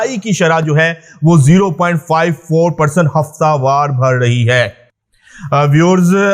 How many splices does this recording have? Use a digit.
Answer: 0